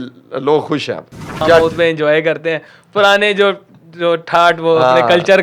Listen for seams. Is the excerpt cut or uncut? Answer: cut